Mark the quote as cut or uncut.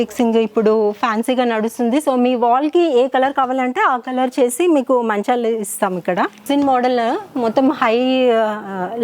cut